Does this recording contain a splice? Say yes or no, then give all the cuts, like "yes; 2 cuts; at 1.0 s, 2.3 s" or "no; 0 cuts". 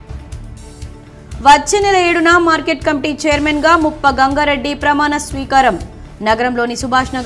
yes; 1 cut; at 1.0 s